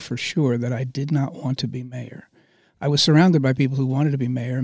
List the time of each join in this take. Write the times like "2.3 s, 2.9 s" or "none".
none